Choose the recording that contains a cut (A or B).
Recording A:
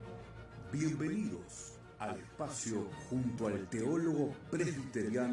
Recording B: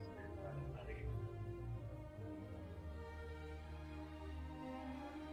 A